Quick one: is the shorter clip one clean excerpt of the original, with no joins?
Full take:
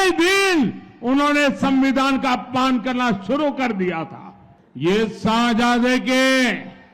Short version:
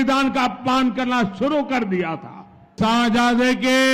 no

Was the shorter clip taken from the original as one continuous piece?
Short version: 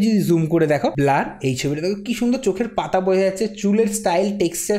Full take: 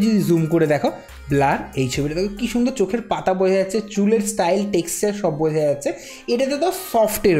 no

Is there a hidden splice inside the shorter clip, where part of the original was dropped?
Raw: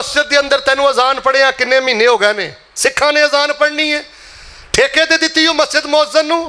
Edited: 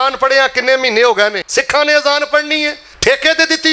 yes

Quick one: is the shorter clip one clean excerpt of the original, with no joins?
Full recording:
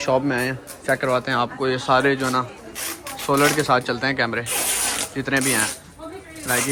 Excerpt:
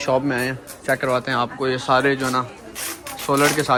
yes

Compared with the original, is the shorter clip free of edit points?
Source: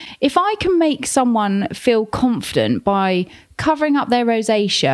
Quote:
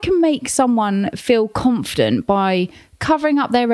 yes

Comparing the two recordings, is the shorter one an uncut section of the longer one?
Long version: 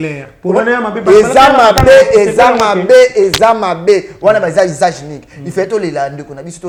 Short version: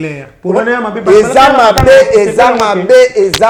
yes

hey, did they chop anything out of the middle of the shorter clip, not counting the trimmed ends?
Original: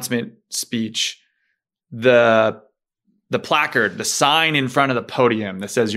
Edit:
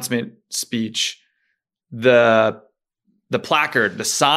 no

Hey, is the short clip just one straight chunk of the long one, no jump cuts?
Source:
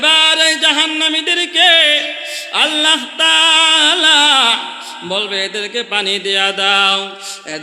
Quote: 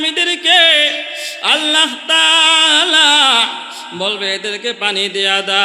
yes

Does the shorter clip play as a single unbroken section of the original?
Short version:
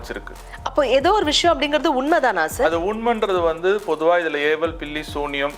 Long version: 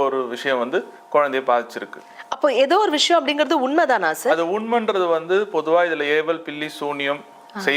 yes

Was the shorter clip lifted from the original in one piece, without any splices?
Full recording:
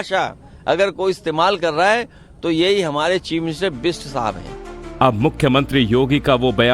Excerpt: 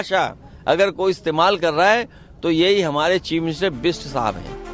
yes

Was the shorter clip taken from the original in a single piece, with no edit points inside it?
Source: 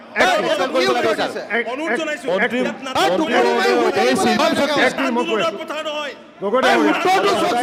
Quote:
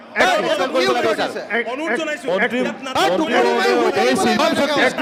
yes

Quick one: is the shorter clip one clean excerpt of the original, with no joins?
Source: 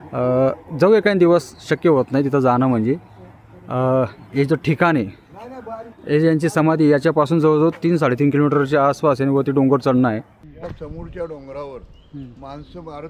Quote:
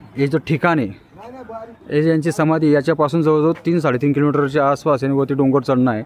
yes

